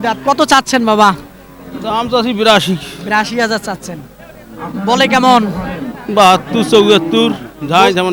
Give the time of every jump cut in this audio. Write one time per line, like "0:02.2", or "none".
none